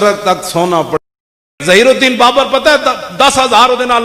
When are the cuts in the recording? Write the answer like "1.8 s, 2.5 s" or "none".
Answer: 1.1 s